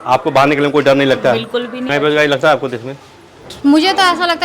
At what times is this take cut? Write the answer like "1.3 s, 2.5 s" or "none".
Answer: 1.9 s